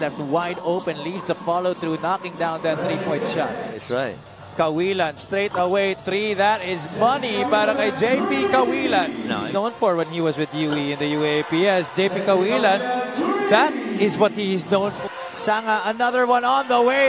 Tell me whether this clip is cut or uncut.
cut